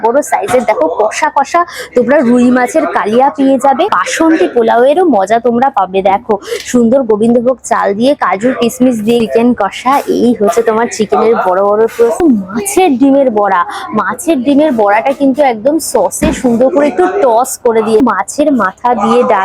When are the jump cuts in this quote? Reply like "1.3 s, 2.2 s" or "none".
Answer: 4.0 s, 9.2 s, 11.8 s, 18.0 s